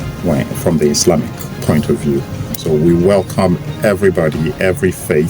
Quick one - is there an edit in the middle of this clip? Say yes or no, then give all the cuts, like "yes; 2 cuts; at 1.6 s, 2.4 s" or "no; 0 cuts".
yes; 1 cut; at 2.5 s